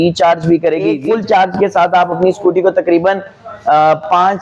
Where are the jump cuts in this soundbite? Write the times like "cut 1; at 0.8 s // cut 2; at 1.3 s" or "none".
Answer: cut 1; at 1.0 s

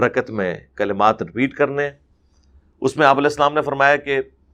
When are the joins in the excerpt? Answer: none

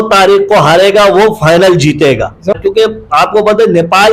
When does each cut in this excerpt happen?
cut 1; at 2.5 s

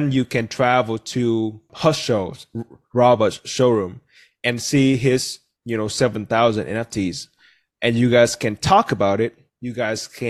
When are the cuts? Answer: cut 1; at 1.7 s

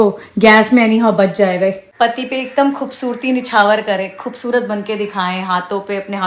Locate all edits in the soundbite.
cut 1; at 1.8 s

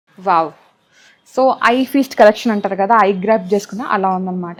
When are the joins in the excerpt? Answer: none

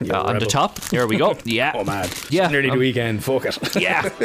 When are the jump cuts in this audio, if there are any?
cut 1; at 2.3 s

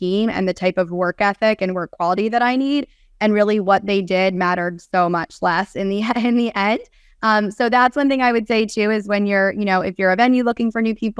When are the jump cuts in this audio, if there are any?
none

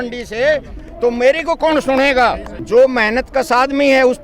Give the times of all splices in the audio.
cut 1; at 2.5 s

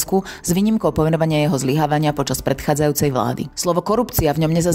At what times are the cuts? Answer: cut 1; at 3.5 s

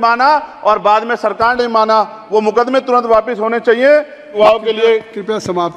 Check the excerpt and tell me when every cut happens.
cut 1; at 4.2 s

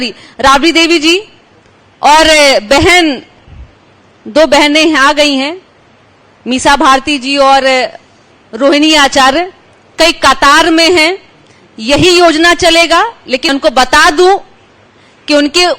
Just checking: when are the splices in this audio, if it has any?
cut 1; at 13.4 s

